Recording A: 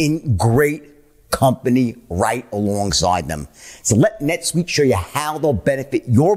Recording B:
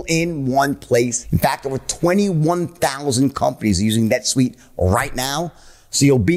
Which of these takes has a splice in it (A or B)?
B